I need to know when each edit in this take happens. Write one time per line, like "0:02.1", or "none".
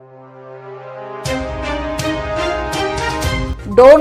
none